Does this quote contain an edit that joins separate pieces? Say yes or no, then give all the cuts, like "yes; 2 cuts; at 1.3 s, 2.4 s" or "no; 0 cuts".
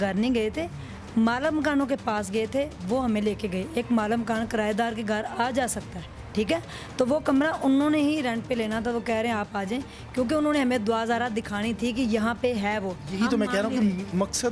no; 0 cuts